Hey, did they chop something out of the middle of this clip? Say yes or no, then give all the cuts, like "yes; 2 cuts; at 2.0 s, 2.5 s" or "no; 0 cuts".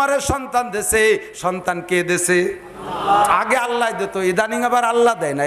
yes; 1 cut; at 3.3 s